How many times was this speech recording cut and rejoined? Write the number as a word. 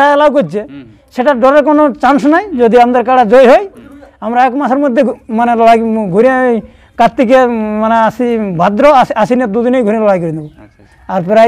zero